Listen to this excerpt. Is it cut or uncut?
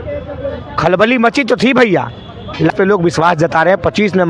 cut